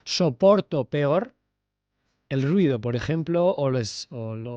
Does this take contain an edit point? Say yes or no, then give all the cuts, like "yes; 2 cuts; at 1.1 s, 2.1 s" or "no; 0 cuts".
no; 0 cuts